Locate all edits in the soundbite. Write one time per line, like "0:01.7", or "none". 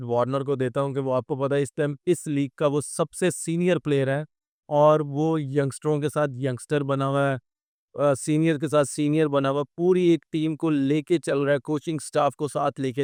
none

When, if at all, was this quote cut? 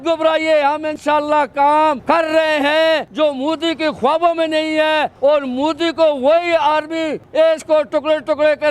0:03.1
0:07.4

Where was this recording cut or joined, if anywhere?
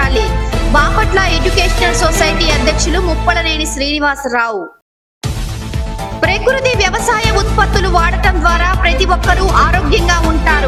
none

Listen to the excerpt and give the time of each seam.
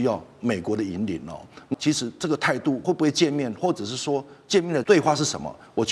0:01.7
0:02.8
0:04.8

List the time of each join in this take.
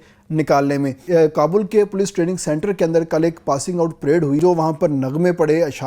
0:01.0
0:04.4

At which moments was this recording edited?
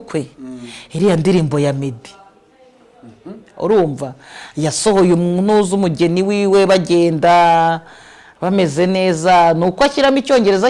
none

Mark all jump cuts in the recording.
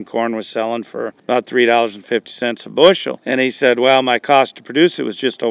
0:01.1
0:03.1

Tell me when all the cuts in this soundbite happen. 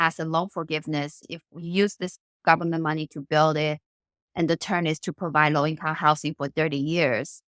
0:01.3

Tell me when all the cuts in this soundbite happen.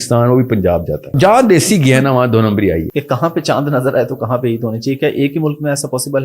0:01.1
0:02.9

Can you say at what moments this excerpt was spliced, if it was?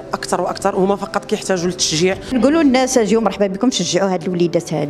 0:02.3

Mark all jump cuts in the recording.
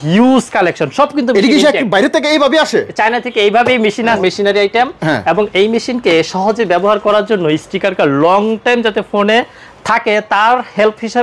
0:04.2

